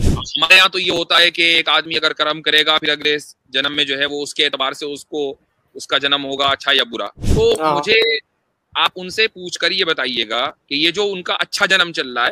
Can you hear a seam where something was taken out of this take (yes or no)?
yes